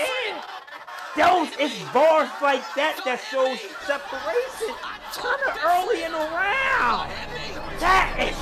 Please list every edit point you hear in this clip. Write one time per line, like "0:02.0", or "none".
none